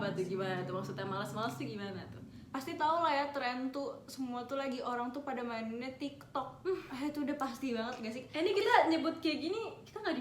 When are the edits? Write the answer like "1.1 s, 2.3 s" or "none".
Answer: none